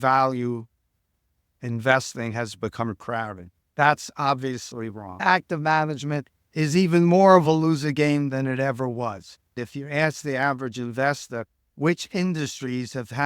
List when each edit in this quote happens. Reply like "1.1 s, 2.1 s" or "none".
5.2 s, 9.6 s